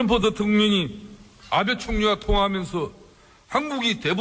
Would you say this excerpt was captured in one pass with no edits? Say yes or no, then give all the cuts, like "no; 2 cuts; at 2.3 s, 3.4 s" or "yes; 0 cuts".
no; 1 cut; at 2.0 s